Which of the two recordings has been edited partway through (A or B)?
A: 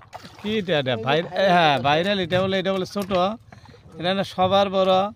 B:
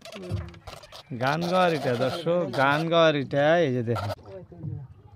B